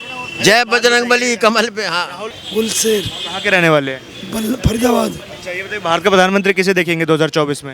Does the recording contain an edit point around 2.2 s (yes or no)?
yes